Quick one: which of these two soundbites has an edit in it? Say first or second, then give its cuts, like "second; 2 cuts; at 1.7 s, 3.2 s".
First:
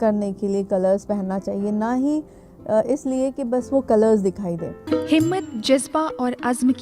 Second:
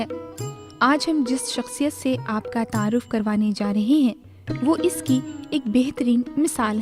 first; 1 cut; at 4.8 s